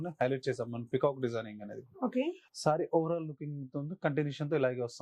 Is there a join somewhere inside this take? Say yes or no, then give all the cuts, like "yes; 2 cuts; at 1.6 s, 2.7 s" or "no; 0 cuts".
yes; 1 cut; at 2.4 s